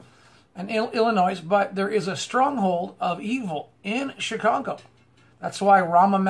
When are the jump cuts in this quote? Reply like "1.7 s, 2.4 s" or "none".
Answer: none

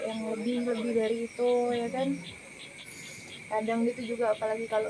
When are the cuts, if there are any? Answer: 2.8 s

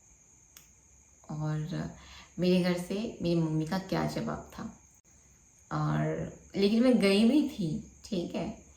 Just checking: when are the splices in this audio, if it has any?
none

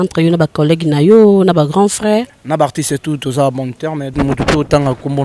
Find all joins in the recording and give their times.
2.4 s, 4.1 s

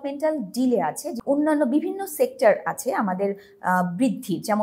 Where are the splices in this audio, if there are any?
none

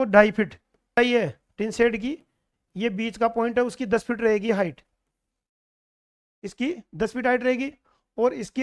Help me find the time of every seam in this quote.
1.0 s

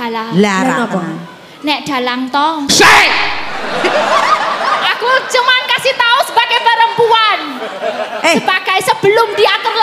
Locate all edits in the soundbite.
none

